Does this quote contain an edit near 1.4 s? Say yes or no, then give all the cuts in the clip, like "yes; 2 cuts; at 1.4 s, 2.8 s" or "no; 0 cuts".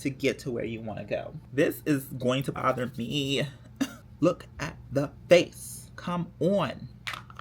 yes; 2 cuts; at 1.4 s, 4.0 s